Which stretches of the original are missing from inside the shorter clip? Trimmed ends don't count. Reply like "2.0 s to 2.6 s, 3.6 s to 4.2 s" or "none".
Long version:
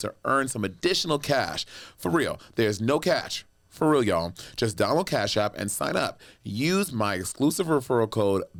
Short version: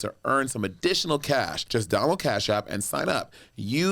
1.6 s to 4.5 s